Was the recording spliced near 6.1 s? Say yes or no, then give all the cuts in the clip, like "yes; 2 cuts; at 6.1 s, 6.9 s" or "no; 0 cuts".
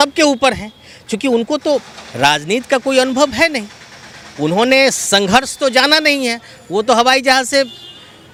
no; 0 cuts